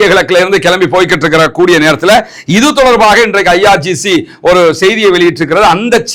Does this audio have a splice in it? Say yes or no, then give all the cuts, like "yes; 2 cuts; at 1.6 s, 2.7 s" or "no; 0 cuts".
no; 0 cuts